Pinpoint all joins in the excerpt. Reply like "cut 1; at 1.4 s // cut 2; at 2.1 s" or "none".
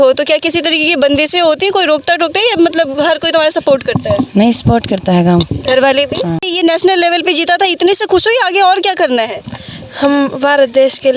cut 1; at 6.5 s

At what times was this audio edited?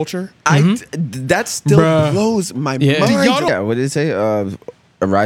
cut 1; at 3.5 s

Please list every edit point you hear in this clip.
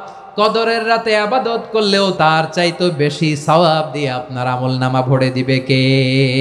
cut 1; at 2.1 s

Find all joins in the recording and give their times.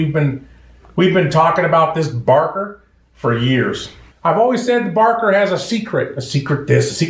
cut 1; at 4.0 s

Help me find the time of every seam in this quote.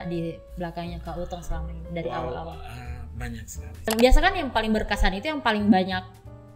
cut 1; at 3.9 s

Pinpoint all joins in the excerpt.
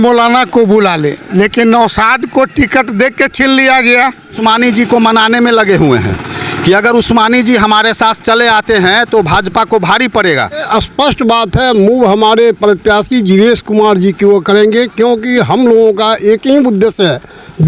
cut 1; at 4.4 s // cut 2; at 10.7 s

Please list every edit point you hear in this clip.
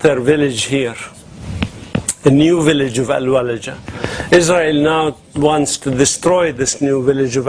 cut 1; at 4.8 s

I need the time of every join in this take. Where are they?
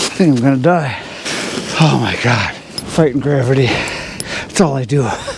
cut 1; at 1.2 s // cut 2; at 2.7 s

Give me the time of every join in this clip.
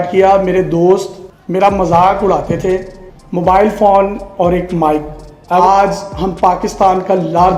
none

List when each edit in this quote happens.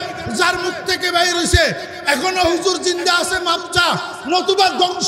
none

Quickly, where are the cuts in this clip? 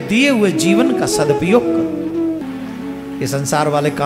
cut 1; at 2.4 s

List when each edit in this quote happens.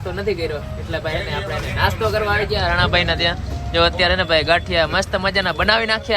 none

